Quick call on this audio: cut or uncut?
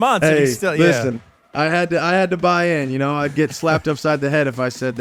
uncut